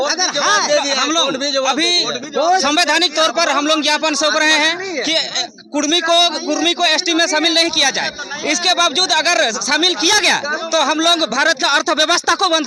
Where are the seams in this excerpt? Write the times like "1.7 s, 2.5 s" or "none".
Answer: none